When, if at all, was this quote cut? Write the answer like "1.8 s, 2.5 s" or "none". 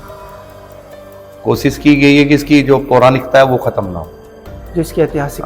1.1 s